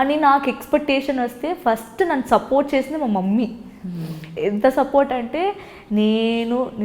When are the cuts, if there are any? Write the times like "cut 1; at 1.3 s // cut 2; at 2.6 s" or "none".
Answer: none